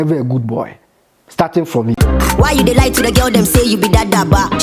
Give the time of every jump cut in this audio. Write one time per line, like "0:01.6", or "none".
0:01.9

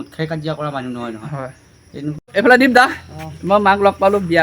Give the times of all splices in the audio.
0:02.2

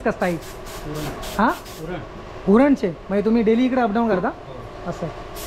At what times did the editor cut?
none

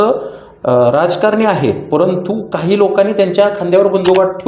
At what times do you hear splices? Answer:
none

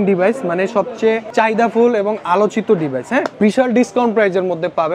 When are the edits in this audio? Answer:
0:01.3
0:03.3

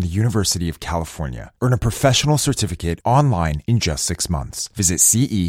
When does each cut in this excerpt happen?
none

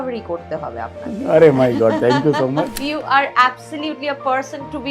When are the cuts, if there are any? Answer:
0:02.8

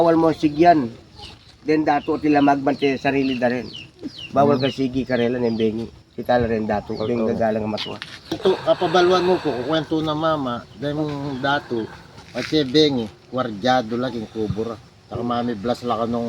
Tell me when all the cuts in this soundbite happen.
0:08.4

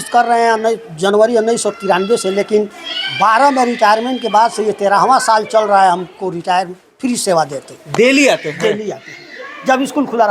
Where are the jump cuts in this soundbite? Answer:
0:09.3

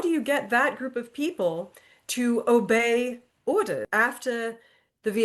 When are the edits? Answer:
0:03.9

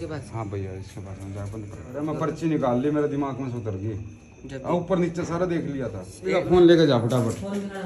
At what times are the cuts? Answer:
0:01.9
0:06.4

